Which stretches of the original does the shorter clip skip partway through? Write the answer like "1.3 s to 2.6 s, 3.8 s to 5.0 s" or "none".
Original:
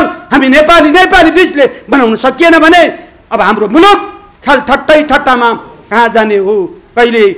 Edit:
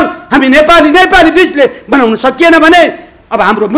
none